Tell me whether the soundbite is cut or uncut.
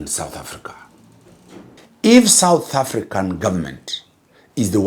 cut